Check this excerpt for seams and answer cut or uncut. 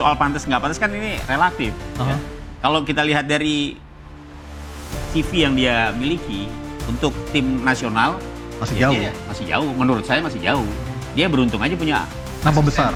uncut